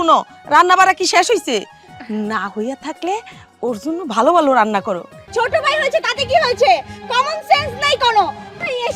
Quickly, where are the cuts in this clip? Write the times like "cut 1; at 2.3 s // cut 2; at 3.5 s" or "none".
cut 1; at 5.2 s